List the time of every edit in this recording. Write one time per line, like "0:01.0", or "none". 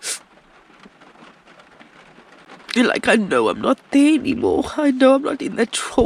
none